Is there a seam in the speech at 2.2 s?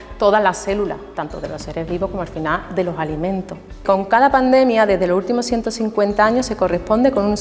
no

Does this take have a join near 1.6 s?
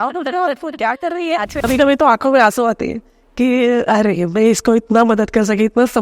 yes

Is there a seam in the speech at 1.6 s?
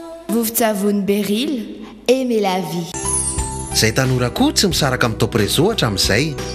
no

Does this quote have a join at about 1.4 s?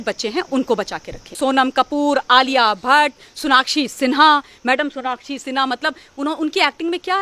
yes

